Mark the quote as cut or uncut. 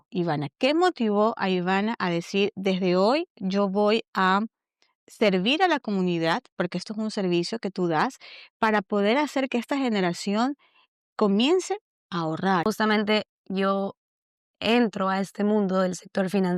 uncut